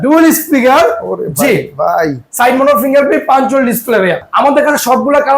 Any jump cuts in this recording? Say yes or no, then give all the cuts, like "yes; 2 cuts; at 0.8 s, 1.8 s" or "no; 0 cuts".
yes; 1 cut; at 4.3 s